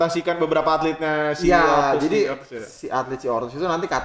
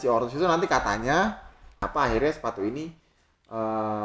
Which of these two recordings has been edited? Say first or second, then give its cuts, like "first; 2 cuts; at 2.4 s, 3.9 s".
second; 1 cut; at 1.8 s